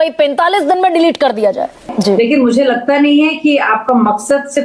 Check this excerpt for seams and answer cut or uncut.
cut